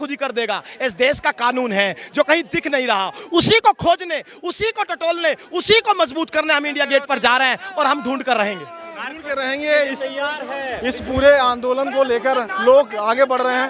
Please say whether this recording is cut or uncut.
uncut